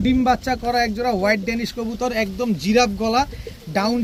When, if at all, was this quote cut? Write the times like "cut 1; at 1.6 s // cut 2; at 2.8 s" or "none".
none